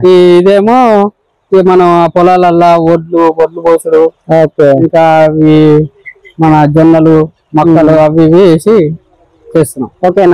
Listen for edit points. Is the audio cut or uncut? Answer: uncut